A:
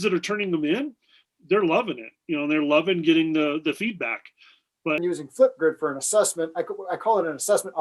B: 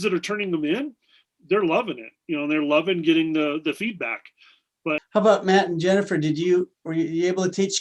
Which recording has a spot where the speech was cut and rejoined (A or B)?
A